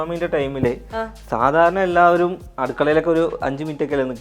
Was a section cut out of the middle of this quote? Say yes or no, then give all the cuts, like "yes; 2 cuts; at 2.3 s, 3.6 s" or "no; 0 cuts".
no; 0 cuts